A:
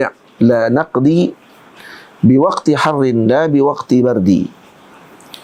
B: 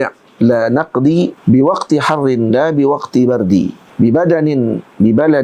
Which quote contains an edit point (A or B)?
B